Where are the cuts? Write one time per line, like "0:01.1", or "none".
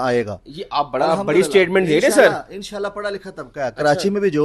none